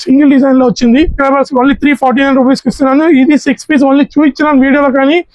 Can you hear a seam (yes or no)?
yes